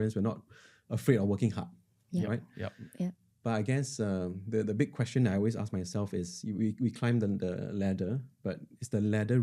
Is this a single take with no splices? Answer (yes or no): yes